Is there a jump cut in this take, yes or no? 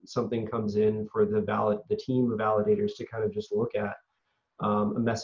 no